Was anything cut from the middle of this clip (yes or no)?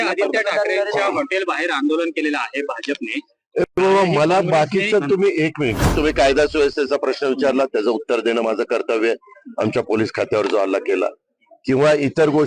yes